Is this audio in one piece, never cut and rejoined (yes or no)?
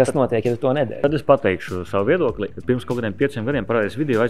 no